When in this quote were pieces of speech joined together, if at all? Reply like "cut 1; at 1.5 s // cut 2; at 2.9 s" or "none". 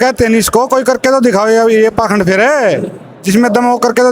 none